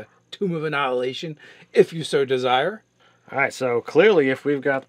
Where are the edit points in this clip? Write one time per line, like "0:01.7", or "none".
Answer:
none